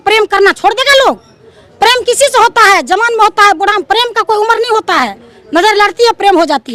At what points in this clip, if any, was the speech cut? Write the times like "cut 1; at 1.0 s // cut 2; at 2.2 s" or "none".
none